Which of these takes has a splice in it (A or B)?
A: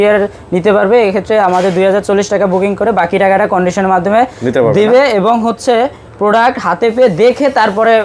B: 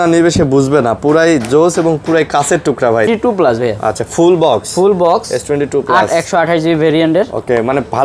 B